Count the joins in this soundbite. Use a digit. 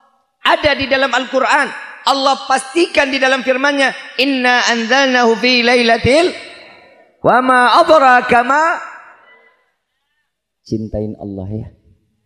1